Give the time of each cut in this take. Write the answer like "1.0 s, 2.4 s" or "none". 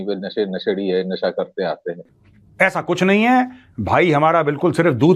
none